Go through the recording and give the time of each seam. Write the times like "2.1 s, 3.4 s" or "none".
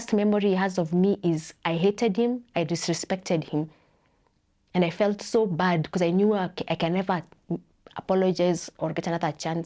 none